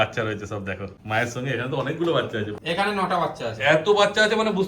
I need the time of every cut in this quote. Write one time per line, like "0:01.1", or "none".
0:00.9
0:02.5